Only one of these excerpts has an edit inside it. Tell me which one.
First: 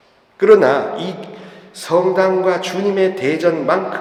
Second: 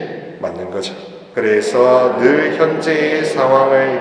second; 1 cut; at 1.2 s

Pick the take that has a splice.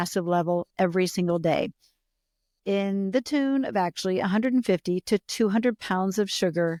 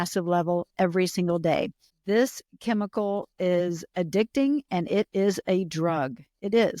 second; 1 cut; at 1.9 s

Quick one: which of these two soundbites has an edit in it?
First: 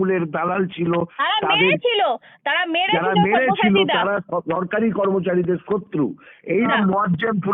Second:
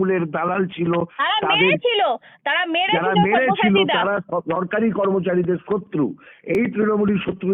first; 1 cut; at 6.5 s

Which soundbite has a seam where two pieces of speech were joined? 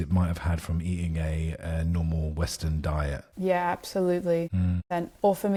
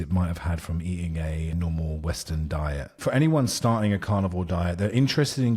second; 2 cuts; at 1.5 s, 2.8 s

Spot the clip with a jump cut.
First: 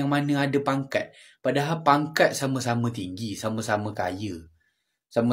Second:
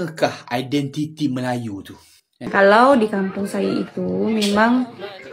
second; 1 cut; at 2.5 s

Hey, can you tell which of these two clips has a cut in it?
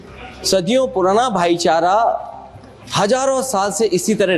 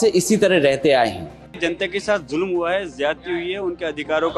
second; 1 cut; at 1.6 s

